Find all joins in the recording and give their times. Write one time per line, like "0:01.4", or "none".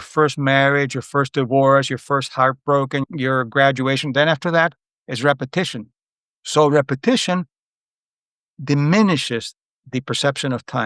0:03.0

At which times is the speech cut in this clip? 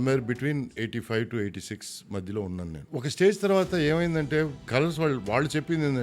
0:02.8
0:04.7

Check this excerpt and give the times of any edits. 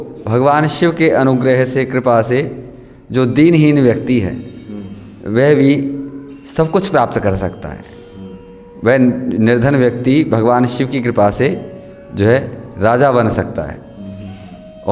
none

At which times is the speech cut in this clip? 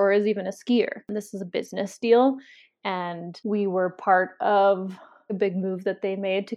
0:01.0
0:03.3
0:05.3

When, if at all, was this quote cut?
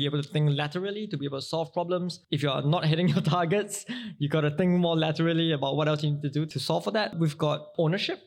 0:02.2

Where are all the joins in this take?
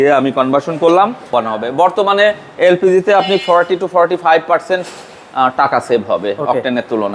0:01.7

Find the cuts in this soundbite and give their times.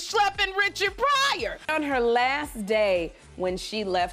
0:01.6

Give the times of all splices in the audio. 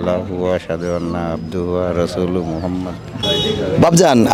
0:03.2

